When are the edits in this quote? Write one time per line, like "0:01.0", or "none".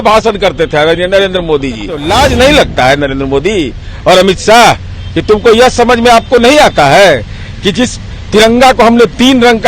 0:01.9